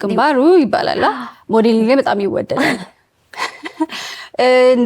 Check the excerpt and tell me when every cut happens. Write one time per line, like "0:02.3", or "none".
none